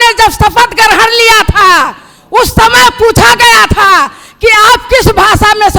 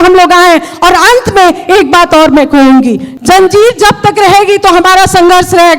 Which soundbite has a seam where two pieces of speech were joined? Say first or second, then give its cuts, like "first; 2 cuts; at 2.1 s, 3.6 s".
second; 1 cut; at 3.1 s